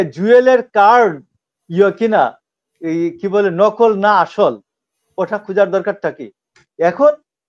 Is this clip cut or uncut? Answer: cut